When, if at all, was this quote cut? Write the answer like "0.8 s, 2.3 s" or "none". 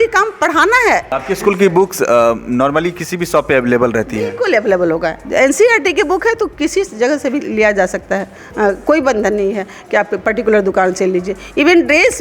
1.1 s